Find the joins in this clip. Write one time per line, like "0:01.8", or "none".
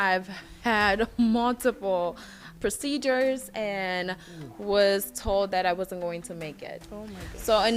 0:02.4